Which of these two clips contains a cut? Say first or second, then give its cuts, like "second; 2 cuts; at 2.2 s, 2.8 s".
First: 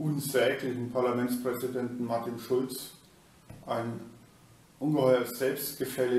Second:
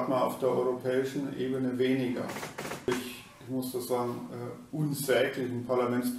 second; 1 cut; at 2.9 s